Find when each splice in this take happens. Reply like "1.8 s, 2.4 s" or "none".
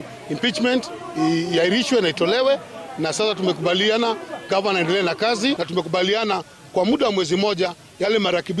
5.6 s